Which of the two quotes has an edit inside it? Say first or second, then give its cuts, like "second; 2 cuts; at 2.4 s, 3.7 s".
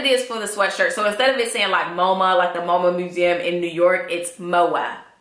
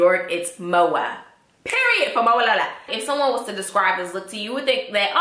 second; 1 cut; at 2.9 s